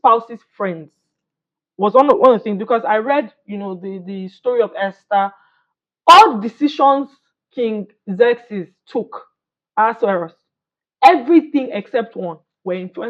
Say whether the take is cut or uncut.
uncut